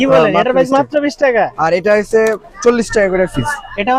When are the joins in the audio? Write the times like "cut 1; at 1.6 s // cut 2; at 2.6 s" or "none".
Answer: none